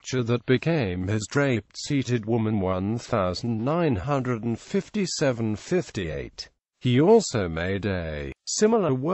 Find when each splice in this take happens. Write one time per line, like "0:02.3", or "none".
none